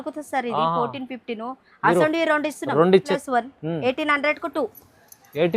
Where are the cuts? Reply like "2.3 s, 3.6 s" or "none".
3.2 s